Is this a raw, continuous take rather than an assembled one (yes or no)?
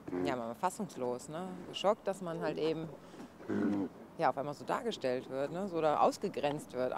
yes